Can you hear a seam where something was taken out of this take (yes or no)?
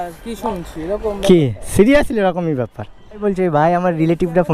yes